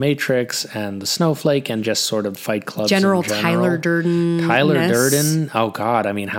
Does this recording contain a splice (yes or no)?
no